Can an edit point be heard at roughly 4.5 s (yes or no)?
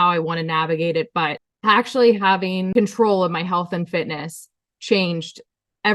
no